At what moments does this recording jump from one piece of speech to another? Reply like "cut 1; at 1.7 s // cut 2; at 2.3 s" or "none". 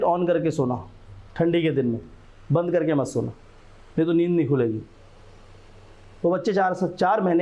none